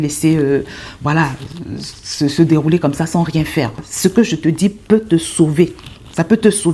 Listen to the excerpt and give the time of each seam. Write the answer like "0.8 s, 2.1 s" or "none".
3.8 s